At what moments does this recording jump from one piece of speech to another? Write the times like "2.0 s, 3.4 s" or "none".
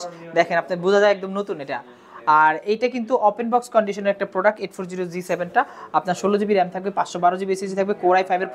none